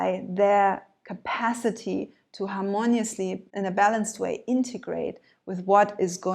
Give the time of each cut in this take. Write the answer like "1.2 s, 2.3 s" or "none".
3.5 s